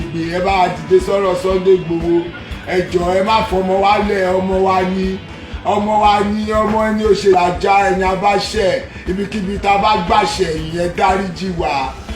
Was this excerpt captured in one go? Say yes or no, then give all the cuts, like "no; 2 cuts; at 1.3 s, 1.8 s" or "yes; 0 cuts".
no; 1 cut; at 7.3 s